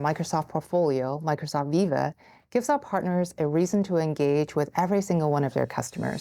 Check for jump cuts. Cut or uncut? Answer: uncut